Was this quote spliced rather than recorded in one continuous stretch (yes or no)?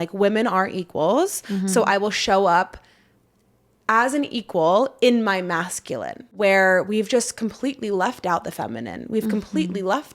yes